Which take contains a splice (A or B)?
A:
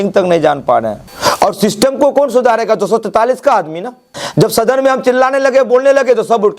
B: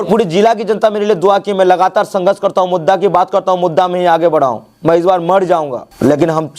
A